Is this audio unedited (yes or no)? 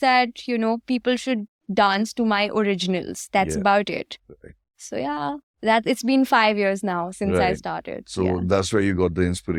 yes